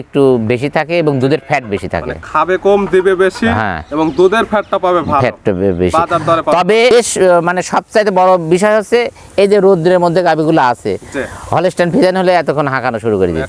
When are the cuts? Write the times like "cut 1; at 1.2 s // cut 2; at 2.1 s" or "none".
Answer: cut 1; at 6.9 s